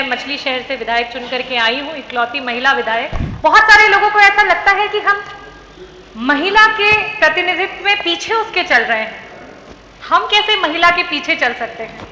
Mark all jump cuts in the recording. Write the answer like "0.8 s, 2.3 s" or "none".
3.2 s